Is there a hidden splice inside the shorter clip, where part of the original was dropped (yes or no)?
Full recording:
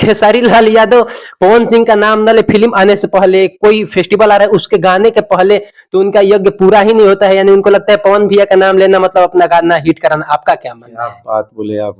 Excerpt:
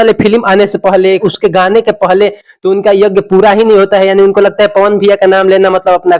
yes